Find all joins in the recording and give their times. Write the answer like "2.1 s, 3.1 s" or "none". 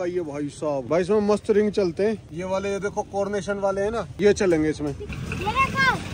none